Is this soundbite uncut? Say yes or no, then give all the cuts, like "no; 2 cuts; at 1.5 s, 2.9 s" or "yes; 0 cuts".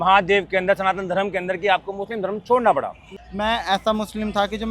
no; 1 cut; at 3.1 s